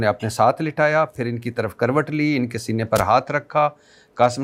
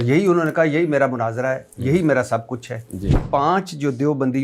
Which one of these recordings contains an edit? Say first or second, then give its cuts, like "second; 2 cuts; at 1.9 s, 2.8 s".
second; 1 cut; at 3.2 s